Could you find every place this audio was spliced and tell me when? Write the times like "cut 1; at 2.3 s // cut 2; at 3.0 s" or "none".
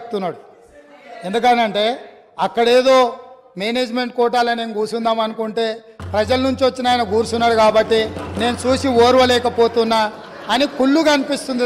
none